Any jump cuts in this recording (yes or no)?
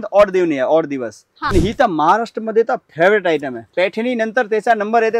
yes